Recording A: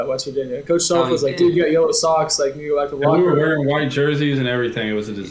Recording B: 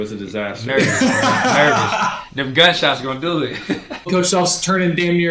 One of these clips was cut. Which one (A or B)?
B